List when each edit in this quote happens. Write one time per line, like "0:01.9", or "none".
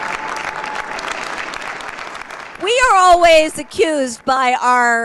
0:02.1